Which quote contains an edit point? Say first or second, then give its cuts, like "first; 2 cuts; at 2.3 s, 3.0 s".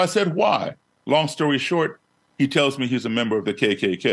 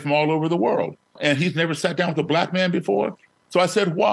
second; 1 cut; at 1.2 s